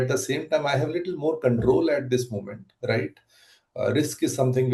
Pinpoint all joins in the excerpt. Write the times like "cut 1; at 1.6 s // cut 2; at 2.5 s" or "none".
none

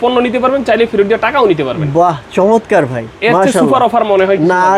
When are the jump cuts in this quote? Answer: none

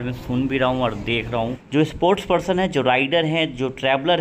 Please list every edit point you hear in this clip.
cut 1; at 1.6 s

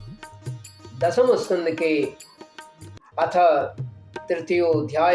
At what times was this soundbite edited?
none

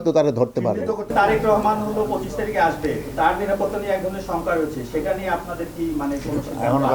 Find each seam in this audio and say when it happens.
cut 1; at 1.0 s

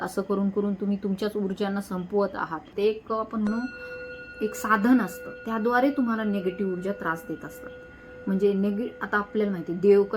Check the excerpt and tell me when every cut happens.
cut 1; at 2.6 s

